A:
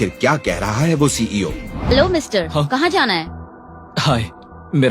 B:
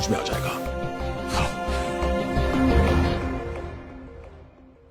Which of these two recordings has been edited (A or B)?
A